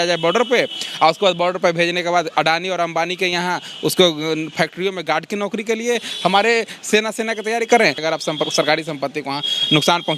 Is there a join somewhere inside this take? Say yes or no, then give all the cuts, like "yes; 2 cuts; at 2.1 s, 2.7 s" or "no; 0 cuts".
yes; 1 cut; at 8.0 s